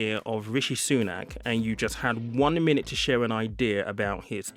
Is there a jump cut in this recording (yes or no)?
no